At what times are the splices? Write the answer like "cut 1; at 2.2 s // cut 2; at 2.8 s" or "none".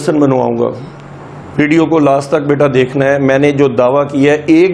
none